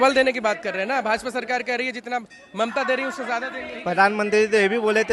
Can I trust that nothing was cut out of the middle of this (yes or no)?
no